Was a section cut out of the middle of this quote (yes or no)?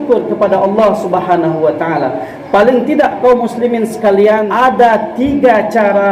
yes